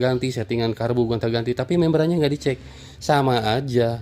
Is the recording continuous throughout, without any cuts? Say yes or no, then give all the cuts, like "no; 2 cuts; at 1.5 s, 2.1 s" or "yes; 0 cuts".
yes; 0 cuts